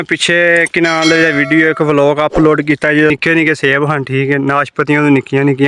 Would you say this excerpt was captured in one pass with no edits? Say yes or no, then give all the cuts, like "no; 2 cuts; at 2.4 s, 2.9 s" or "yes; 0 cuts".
no; 1 cut; at 3.1 s